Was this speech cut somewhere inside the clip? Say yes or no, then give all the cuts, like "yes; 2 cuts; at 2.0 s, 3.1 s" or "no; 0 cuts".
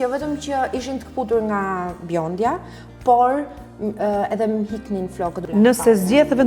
yes; 1 cut; at 5.4 s